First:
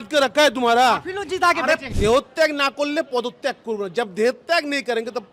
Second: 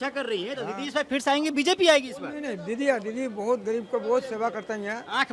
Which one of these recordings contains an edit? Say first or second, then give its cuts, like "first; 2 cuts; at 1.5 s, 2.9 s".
first; 1 cut; at 1.9 s